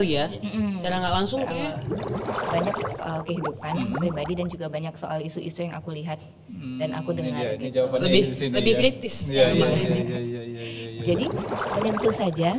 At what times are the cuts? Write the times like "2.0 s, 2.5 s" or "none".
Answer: 2.3 s, 11.5 s